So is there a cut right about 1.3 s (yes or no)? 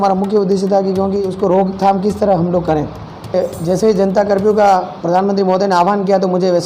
yes